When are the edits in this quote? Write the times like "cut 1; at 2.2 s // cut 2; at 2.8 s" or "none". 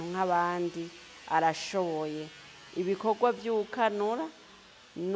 none